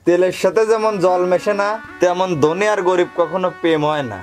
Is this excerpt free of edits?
no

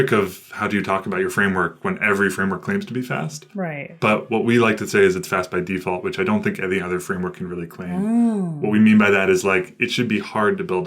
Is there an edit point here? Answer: no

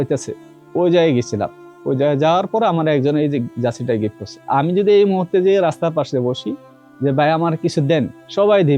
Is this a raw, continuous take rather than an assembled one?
no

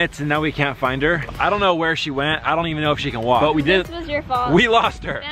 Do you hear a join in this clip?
no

